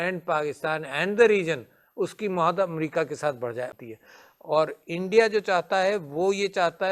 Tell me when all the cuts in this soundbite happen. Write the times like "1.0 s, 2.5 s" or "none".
3.8 s